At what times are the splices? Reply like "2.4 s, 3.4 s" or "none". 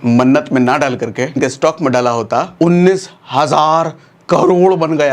1.4 s, 2.5 s